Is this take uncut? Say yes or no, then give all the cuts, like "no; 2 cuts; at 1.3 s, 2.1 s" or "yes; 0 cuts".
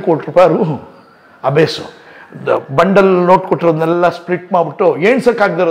yes; 0 cuts